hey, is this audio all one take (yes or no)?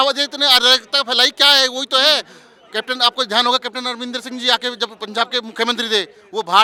yes